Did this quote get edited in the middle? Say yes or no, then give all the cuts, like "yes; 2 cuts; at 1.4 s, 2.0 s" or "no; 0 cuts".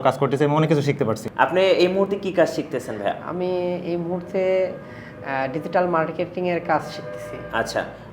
yes; 1 cut; at 1.2 s